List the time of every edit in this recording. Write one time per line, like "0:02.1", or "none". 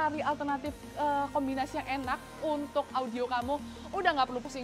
none